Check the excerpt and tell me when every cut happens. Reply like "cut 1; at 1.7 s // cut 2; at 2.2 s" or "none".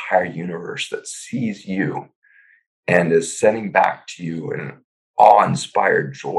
none